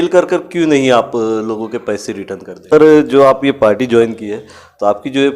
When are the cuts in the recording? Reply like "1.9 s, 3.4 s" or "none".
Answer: 2.7 s